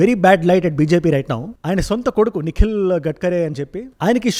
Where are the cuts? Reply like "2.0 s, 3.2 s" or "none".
none